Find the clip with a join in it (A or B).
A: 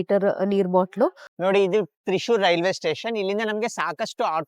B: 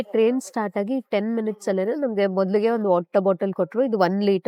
A